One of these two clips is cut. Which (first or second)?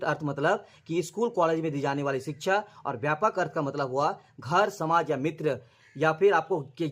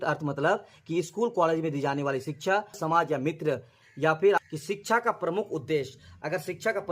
second